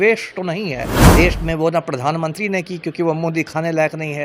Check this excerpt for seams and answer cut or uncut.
cut